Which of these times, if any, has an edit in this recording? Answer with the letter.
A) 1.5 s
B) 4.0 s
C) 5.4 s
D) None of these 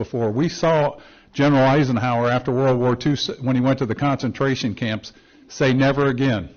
D